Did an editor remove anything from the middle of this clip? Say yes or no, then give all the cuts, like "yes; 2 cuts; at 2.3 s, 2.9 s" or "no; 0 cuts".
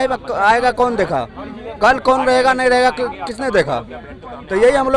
no; 0 cuts